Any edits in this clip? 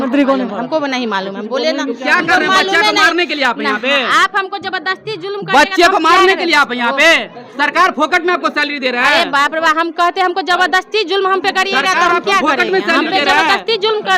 no; 0 cuts

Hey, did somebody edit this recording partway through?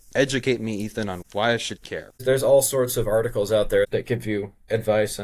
yes; 3 cuts; at 1.2 s, 2.2 s, 3.9 s

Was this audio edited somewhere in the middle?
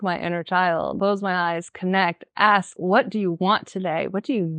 yes; 2 cuts; at 1.0 s, 2.7 s

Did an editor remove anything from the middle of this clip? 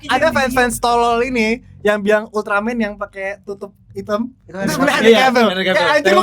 no; 0 cuts

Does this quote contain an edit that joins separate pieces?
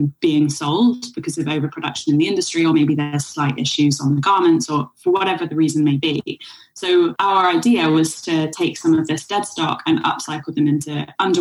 yes; 1 cut; at 7.1 s

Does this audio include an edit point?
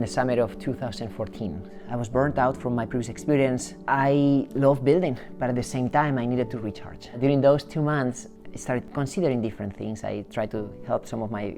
yes; 4 cuts; at 1.7 s, 3.7 s, 7.1 s, 8.4 s

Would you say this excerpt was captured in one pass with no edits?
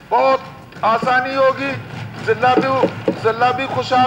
yes; 0 cuts

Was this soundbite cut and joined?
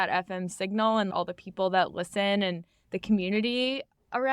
yes; 1 cut; at 1.1 s

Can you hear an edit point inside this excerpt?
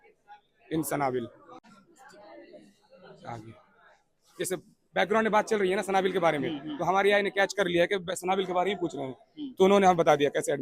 yes; 1 cut; at 1.7 s

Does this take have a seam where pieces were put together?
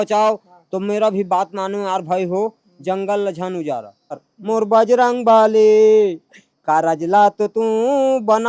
yes; 1 cut; at 4.2 s

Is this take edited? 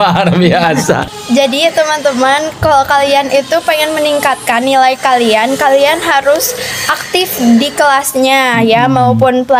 yes; 1 cut; at 1.0 s

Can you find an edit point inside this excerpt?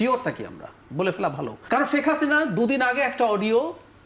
yes; 1 cut; at 1.6 s

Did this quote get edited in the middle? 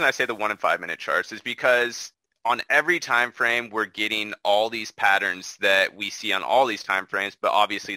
no; 0 cuts

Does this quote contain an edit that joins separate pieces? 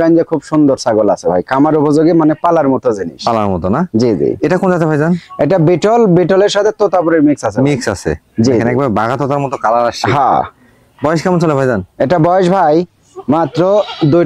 no; 0 cuts

